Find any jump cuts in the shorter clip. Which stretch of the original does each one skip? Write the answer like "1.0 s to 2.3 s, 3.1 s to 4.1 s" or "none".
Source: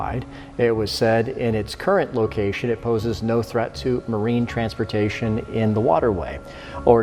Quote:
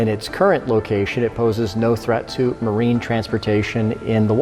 none